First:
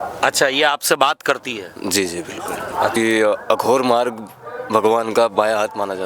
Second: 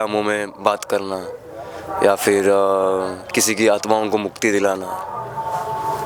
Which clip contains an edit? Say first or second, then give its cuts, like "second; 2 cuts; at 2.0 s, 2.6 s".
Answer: first; 1 cut; at 3.0 s